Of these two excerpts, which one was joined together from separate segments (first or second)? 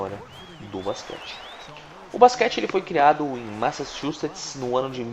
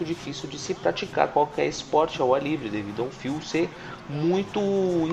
first